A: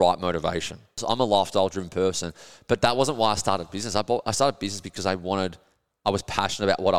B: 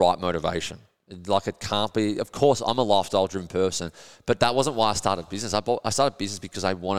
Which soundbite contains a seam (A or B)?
A